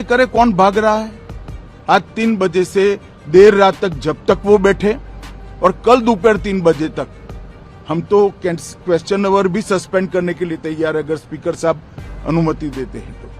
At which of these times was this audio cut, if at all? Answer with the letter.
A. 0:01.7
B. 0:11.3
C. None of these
A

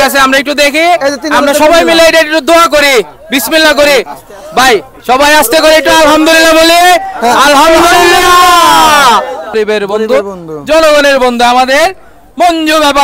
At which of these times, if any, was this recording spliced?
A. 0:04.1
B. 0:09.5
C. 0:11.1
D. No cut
B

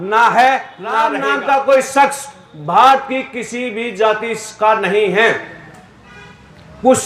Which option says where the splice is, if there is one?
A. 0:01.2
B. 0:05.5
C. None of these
A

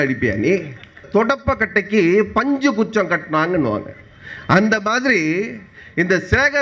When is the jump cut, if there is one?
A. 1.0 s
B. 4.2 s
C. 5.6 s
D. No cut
A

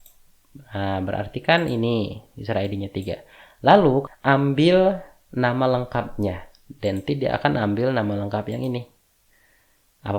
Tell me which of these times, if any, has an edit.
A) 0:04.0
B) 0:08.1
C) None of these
A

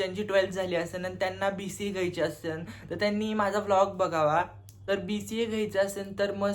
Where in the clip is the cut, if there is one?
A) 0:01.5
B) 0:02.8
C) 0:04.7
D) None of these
C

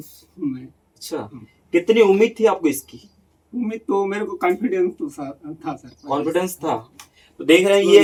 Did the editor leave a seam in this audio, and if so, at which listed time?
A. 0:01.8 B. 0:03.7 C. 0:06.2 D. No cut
D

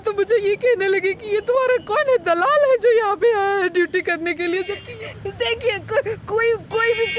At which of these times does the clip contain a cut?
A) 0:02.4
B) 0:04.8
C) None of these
B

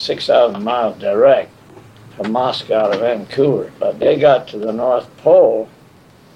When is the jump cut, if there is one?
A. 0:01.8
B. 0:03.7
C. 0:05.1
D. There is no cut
B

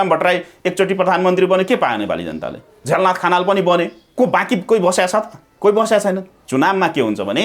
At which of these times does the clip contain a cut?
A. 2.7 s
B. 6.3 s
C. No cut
B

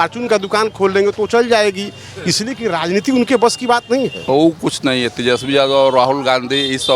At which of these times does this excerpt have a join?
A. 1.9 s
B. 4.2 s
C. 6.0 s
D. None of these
B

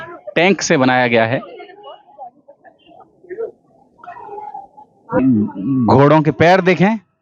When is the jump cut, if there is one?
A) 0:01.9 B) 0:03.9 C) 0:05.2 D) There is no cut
C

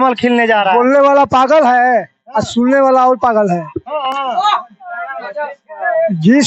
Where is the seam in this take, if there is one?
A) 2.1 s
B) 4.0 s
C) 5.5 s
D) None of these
D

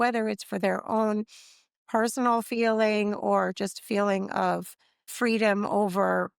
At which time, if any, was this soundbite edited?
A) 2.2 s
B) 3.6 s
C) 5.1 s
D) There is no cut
C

